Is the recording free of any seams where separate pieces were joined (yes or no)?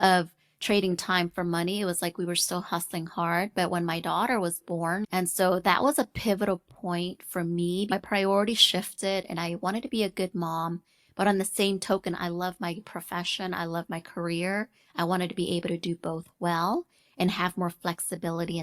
no